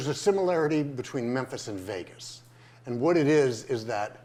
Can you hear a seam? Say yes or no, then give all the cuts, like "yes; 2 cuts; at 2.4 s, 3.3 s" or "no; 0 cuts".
no; 0 cuts